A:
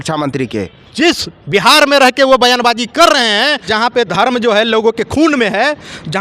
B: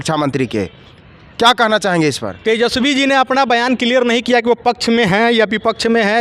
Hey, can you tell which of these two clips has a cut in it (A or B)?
A